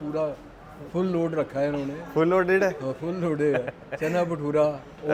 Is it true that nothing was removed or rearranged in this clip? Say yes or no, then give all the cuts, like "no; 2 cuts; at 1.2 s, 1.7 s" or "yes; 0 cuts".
yes; 0 cuts